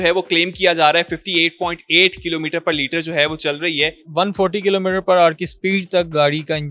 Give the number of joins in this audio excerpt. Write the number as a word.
one